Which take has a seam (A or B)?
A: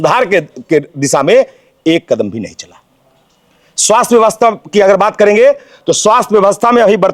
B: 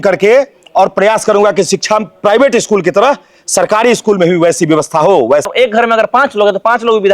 B